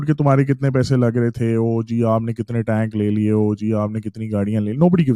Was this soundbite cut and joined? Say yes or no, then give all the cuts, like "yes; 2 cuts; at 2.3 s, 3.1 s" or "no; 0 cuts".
no; 0 cuts